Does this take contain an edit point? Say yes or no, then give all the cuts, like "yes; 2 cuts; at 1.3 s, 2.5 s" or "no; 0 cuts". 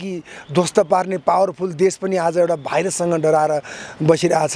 no; 0 cuts